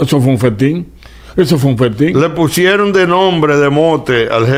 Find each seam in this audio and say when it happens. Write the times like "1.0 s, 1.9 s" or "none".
none